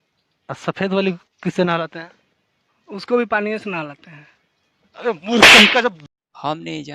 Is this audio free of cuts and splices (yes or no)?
no